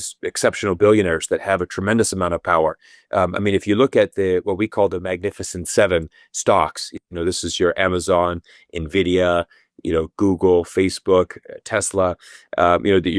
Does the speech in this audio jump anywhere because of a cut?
no; 0 cuts

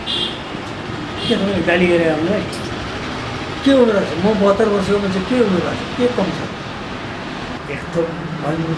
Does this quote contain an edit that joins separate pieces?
yes; 1 cut; at 7.5 s

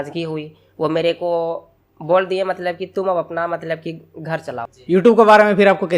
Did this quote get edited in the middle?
yes; 1 cut; at 4.6 s

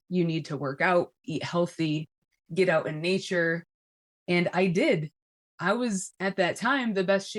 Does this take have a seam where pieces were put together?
no; 0 cuts

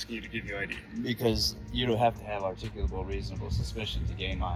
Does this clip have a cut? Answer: no; 0 cuts

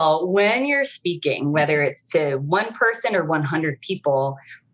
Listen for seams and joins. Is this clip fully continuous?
yes; 0 cuts

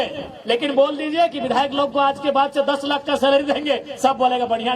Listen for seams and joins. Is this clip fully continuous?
yes; 0 cuts

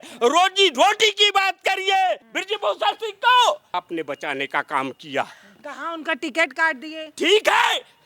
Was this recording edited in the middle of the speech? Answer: yes; 2 cuts; at 2.3 s, 3.8 s

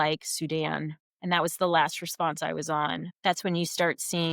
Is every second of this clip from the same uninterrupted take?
no; 2 cuts; at 1.0 s, 3.1 s

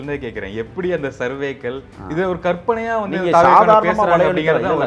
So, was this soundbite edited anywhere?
no; 0 cuts

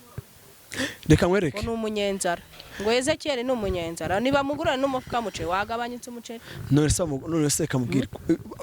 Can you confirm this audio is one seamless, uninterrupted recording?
yes; 0 cuts

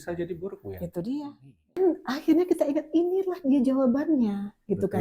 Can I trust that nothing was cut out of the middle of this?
no; 1 cut; at 1.8 s

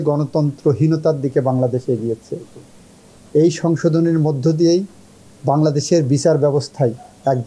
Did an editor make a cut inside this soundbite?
no; 0 cuts

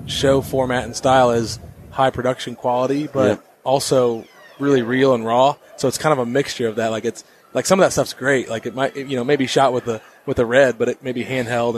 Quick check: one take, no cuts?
yes; 0 cuts

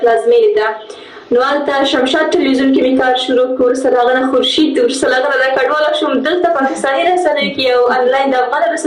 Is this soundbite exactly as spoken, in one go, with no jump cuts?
yes; 0 cuts

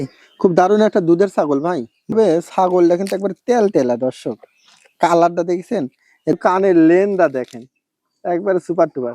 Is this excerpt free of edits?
no; 2 cuts; at 2.1 s, 6.4 s

